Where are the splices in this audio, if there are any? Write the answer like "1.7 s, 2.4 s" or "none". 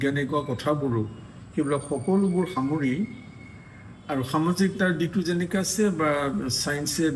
none